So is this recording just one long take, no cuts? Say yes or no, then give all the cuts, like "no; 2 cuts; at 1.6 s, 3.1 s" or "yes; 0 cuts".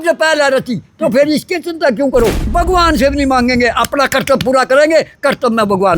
no; 1 cut; at 2.5 s